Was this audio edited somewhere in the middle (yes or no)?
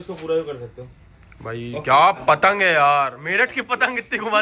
no